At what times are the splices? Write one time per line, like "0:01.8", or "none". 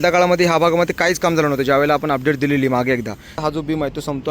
0:03.4